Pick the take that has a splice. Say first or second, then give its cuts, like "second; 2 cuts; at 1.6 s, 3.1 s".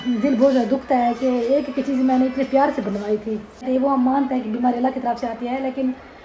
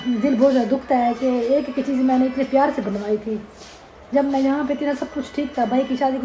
first; 1 cut; at 3.7 s